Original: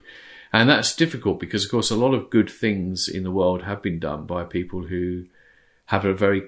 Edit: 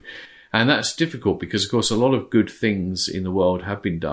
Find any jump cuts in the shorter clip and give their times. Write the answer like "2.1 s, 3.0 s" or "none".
none

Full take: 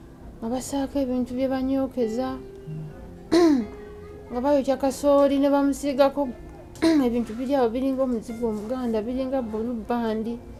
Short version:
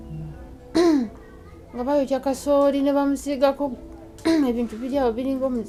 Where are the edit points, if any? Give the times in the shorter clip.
none

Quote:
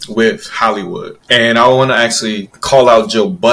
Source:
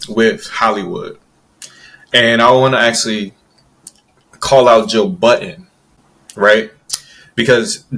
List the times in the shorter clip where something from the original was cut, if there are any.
1.1 s, 2.5 s

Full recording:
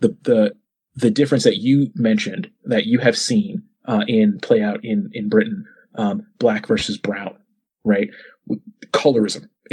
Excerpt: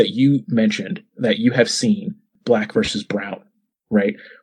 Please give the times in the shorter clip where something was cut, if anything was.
2.3 s

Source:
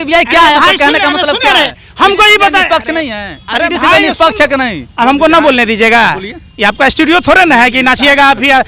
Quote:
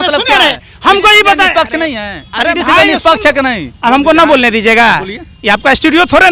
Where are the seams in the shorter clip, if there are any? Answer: none

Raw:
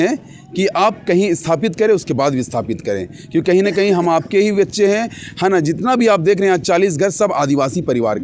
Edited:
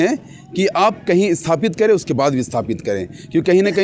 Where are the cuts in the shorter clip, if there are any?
none

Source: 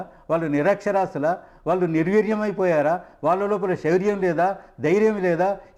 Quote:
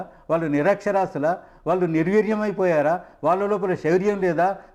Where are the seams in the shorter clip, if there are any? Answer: none

